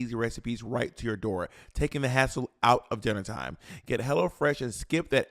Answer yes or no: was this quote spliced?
yes